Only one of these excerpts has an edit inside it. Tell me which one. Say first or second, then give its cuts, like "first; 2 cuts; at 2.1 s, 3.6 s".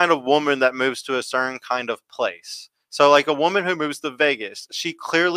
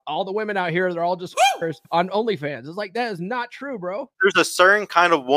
second; 2 cuts; at 1.4 s, 4.0 s